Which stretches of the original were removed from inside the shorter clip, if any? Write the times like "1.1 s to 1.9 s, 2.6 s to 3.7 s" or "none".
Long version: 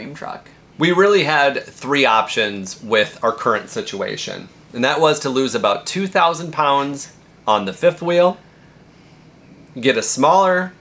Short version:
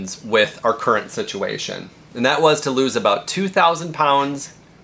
none